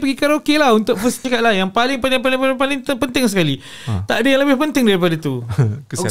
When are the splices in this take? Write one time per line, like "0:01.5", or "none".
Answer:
0:01.1